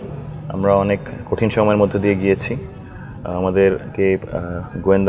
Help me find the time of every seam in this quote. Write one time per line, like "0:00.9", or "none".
none